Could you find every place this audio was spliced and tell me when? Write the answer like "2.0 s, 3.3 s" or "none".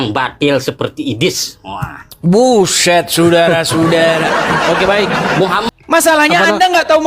5.7 s